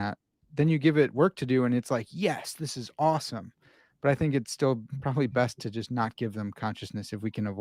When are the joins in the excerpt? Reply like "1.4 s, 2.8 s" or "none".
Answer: none